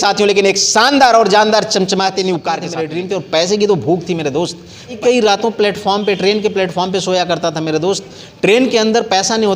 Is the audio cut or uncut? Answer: cut